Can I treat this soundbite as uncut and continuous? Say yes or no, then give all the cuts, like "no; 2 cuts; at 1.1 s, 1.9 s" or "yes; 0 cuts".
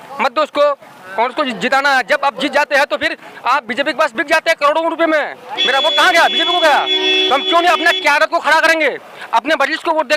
yes; 0 cuts